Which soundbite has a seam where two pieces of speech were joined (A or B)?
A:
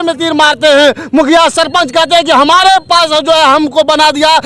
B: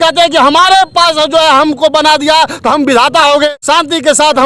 B